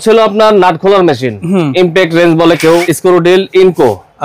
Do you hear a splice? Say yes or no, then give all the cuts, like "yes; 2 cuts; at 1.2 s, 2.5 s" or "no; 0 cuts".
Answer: yes; 1 cut; at 2.9 s